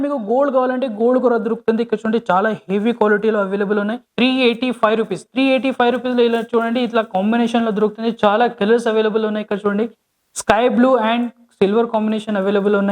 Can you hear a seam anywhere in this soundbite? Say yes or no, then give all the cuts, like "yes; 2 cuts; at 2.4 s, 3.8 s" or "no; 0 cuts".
yes; 1 cut; at 4.0 s